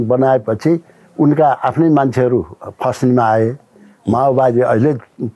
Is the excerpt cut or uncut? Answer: uncut